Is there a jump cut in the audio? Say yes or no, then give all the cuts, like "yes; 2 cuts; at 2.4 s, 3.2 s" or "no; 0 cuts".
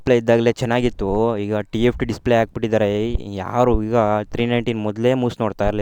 no; 0 cuts